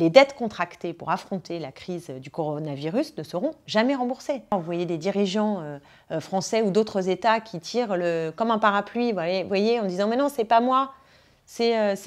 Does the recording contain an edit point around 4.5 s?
yes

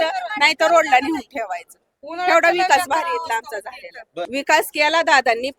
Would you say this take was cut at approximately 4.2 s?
yes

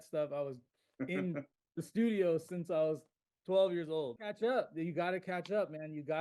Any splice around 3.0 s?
no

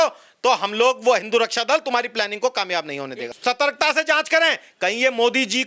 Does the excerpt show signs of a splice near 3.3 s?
yes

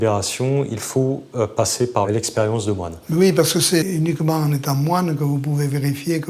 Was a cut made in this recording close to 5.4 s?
no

